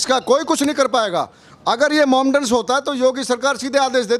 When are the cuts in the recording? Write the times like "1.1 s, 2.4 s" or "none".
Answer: none

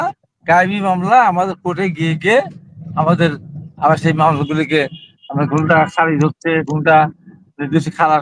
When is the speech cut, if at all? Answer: none

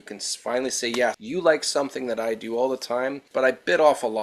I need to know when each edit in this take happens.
1.2 s, 3.2 s

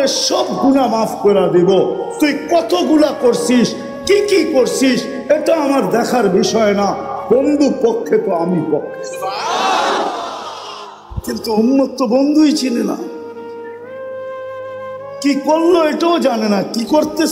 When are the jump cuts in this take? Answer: 13.2 s, 14.9 s

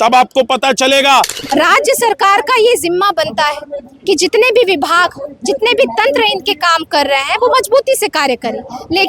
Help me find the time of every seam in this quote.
1.4 s

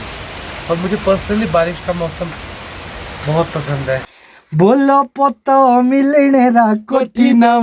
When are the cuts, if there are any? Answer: 4.1 s

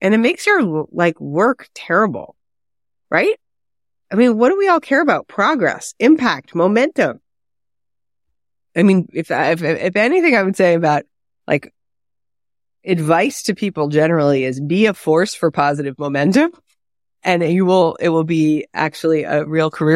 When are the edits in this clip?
none

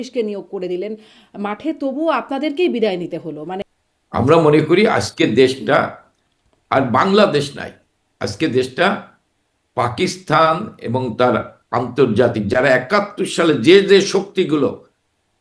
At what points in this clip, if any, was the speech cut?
3.7 s

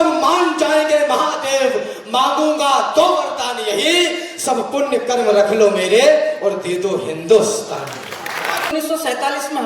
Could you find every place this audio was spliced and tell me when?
8.7 s

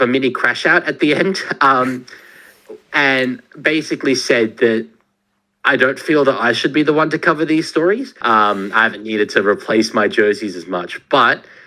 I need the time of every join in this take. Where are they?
8.1 s

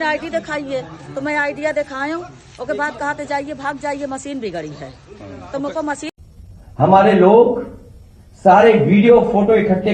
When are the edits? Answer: 6.0 s

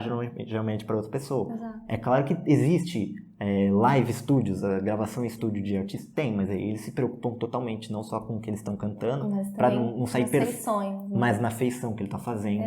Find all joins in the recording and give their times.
none

